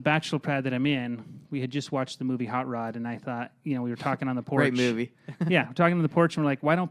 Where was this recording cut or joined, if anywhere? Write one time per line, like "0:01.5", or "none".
none